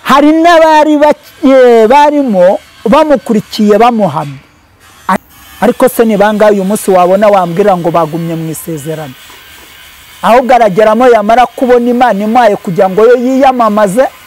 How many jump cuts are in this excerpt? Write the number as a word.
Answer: one